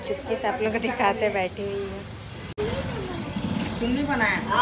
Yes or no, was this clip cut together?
no